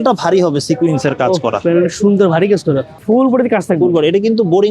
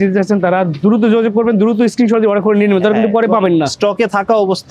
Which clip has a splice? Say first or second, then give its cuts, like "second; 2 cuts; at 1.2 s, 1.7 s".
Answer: first; 1 cut; at 2.9 s